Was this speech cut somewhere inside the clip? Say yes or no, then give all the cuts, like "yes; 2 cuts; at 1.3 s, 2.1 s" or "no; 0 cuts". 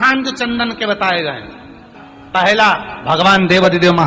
yes; 1 cut; at 2.9 s